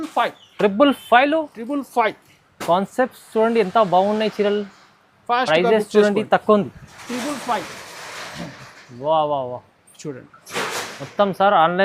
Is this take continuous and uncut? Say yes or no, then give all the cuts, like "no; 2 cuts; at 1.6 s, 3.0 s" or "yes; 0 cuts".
yes; 0 cuts